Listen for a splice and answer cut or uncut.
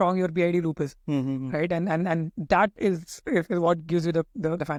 uncut